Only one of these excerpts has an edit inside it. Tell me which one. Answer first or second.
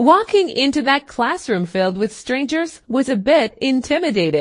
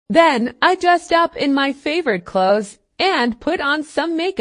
second